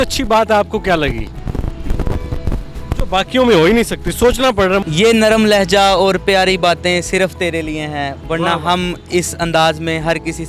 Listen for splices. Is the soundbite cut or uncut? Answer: cut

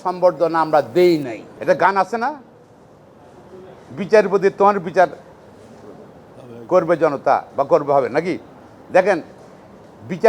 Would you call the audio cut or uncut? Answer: cut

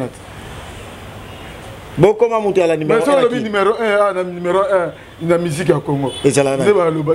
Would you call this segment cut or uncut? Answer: uncut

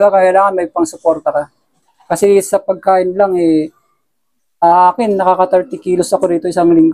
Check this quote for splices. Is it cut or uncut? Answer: uncut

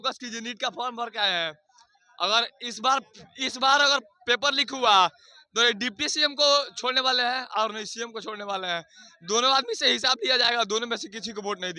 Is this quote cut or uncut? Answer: uncut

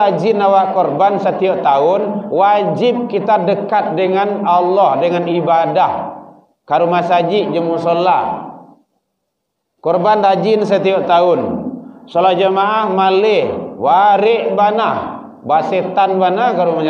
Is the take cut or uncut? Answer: uncut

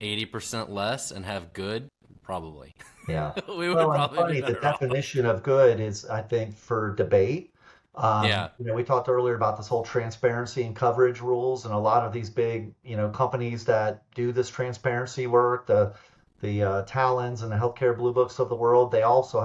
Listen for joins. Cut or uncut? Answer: uncut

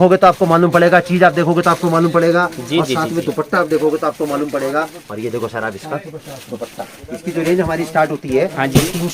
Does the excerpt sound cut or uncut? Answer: cut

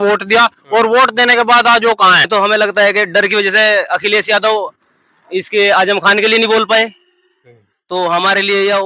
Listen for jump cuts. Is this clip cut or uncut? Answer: cut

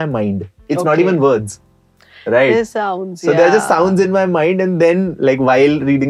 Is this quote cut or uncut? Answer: uncut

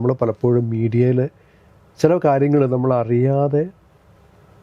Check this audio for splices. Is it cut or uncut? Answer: uncut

